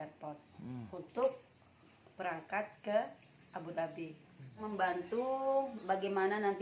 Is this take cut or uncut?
cut